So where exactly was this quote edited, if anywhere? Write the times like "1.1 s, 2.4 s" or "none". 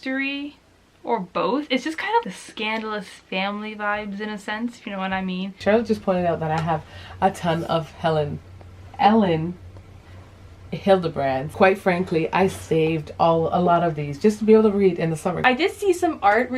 2.2 s, 5.6 s, 11.5 s, 15.3 s